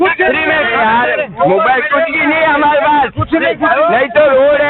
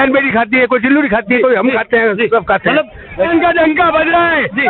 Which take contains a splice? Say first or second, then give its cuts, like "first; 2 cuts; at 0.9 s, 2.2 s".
second; 1 cut; at 3.3 s